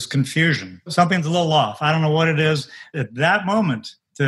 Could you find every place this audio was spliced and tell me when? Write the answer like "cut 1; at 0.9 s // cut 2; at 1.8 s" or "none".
cut 1; at 0.9 s // cut 2; at 2.9 s